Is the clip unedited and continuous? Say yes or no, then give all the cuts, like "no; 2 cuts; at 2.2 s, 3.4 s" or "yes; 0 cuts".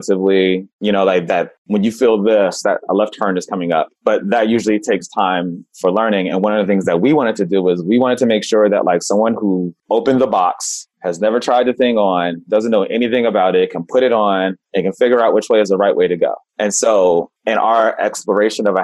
yes; 0 cuts